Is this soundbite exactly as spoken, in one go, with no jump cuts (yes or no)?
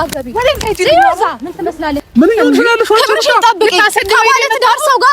no